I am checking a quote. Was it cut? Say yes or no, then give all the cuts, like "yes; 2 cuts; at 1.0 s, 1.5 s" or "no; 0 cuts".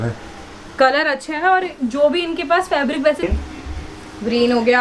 yes; 1 cut; at 3.2 s